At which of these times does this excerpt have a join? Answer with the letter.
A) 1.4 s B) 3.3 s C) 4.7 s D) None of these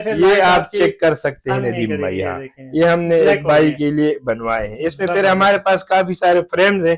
D